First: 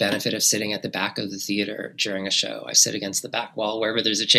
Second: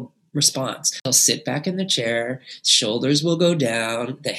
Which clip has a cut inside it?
second; 1 cut; at 1.0 s

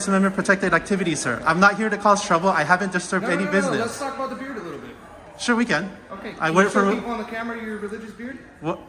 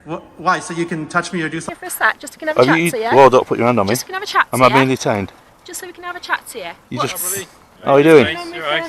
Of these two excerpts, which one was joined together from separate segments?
second; 1 cut; at 1.6 s

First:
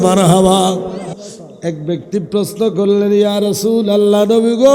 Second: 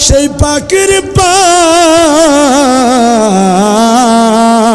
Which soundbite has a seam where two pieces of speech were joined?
first; 1 cut; at 1.1 s

